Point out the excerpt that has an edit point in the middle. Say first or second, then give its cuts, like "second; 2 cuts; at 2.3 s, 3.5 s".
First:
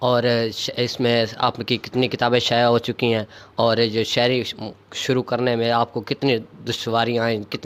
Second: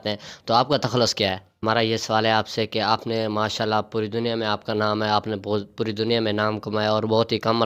second; 1 cut; at 1.5 s